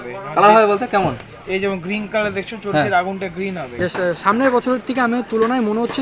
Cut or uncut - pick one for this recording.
cut